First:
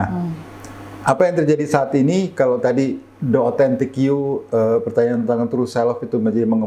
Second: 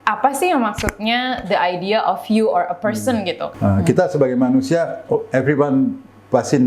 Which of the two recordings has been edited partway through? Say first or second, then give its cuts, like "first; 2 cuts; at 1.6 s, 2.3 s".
second; 1 cut; at 3.5 s